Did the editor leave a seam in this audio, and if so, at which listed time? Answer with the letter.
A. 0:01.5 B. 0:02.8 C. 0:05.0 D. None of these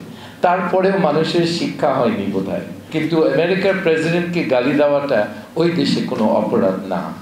B